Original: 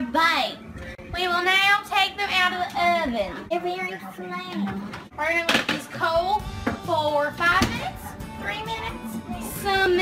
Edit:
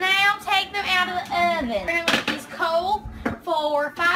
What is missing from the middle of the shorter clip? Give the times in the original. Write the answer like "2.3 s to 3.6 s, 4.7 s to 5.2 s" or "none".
3.3 s to 5.3 s